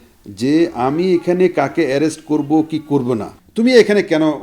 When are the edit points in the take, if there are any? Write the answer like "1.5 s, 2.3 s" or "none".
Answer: 3.4 s